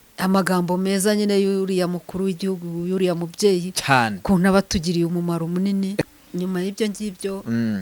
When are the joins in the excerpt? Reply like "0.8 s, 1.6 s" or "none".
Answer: 6.0 s